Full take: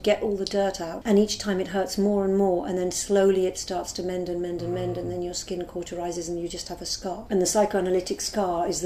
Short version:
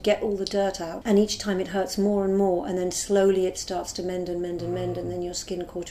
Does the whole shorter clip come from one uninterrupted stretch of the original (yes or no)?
yes